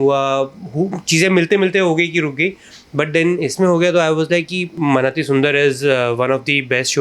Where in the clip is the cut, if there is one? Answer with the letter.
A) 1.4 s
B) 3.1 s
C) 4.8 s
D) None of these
C